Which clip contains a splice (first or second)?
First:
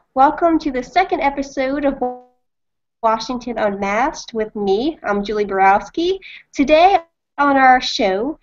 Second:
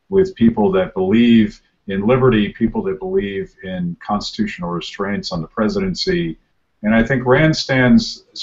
second